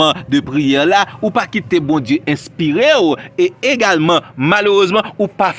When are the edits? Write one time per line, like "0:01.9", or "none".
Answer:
none

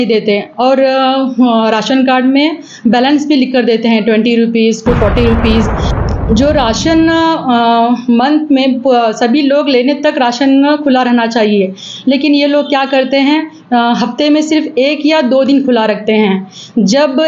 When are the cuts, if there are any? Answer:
0:05.8

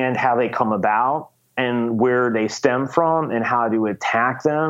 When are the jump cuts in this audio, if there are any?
none

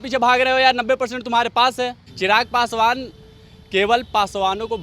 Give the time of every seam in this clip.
0:02.0

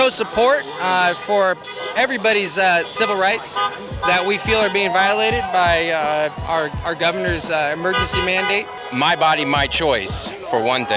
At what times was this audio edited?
0:08.7

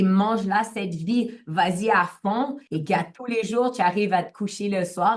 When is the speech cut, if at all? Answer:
0:02.6

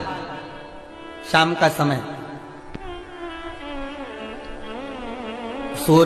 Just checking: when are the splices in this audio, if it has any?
none

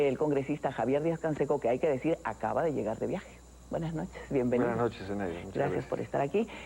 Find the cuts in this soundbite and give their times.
0:01.9

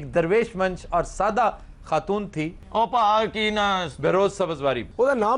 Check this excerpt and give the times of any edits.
0:02.6

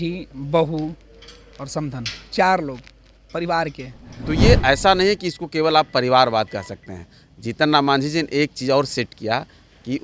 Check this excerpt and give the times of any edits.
0:04.1

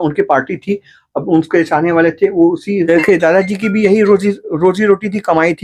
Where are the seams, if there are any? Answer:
0:02.8

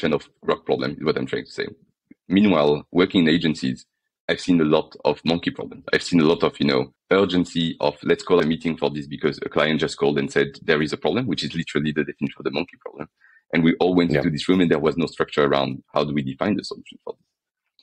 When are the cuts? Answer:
0:06.9
0:08.4

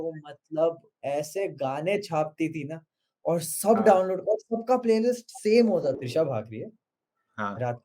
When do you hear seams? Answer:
0:06.0

